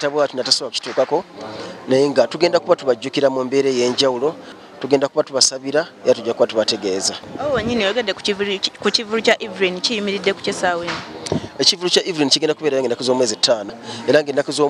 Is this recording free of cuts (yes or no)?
no